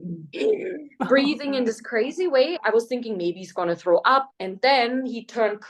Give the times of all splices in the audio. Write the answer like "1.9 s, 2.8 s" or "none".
2.6 s, 4.3 s